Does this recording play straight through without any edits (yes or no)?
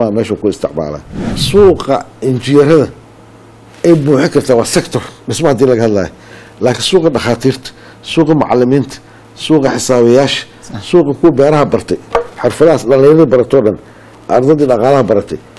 no